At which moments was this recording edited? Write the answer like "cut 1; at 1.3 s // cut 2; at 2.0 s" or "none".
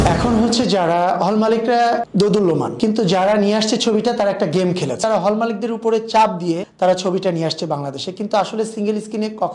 cut 1; at 5.0 s // cut 2; at 6.7 s